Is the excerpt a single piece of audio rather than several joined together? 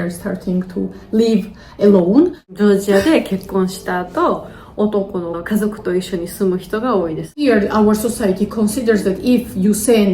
no; 2 cuts; at 2.5 s, 7.4 s

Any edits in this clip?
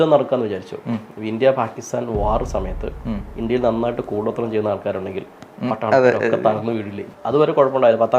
yes; 1 cut; at 7.0 s

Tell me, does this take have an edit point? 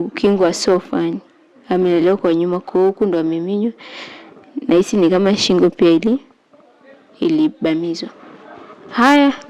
no; 0 cuts

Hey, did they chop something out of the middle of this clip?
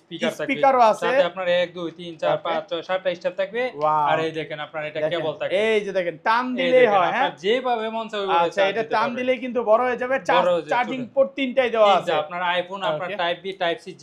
no; 0 cuts

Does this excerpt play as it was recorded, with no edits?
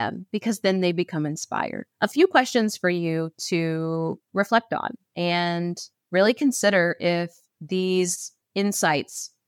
no; 3 cuts; at 1.8 s, 5.0 s, 5.9 s

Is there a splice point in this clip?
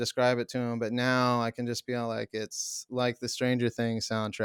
no; 0 cuts

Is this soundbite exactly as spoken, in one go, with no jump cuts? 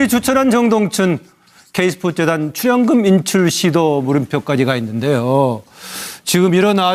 yes; 0 cuts

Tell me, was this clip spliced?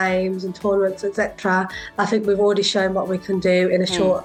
no; 0 cuts

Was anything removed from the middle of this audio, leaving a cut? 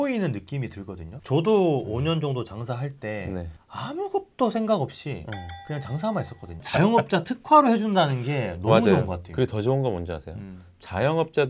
yes; 1 cut; at 6.5 s

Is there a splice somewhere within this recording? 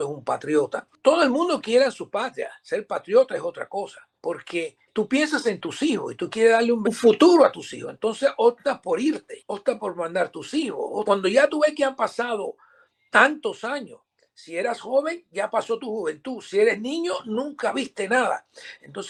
no; 0 cuts

